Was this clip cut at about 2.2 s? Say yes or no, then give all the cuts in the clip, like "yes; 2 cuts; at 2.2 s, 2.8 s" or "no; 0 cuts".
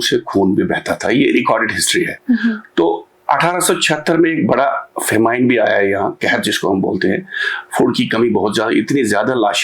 no; 0 cuts